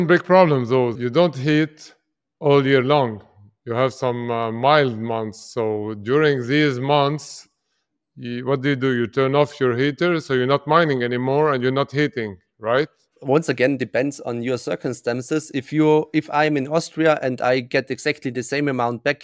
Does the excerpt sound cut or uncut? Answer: cut